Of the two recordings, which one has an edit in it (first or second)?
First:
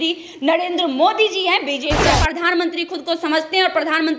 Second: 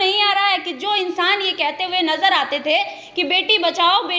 first